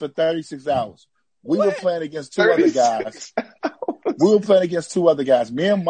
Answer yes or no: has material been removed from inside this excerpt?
no